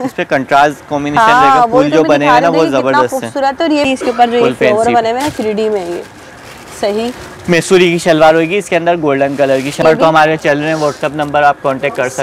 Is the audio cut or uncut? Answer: cut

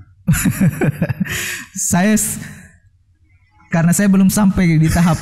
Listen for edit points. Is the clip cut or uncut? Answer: uncut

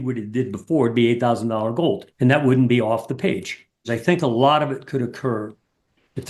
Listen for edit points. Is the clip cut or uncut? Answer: cut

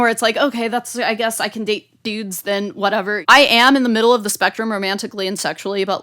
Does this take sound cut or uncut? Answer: cut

